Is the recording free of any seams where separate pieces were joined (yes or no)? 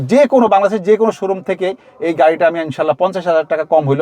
yes